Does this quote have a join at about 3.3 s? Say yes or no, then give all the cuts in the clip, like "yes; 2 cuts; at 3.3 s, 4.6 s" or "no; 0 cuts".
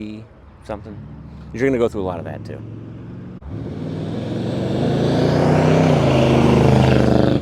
yes; 1 cut; at 3.3 s